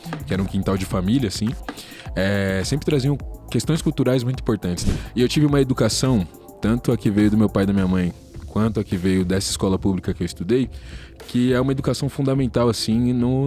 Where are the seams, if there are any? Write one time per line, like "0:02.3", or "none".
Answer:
0:04.9